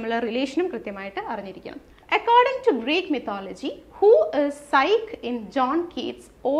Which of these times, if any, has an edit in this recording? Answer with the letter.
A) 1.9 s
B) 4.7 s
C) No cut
A